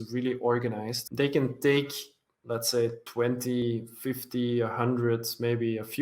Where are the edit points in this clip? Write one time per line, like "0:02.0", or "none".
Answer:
0:00.9
0:03.3